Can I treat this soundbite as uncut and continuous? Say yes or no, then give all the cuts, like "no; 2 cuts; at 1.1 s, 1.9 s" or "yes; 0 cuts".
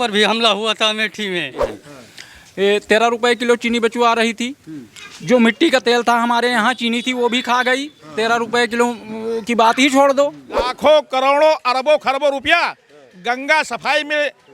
no; 2 cuts; at 1.8 s, 10.7 s